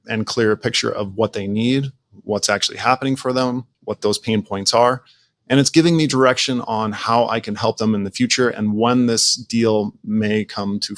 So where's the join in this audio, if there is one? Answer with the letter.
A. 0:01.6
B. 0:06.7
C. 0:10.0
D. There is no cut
D